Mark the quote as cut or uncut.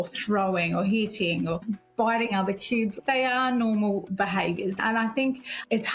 cut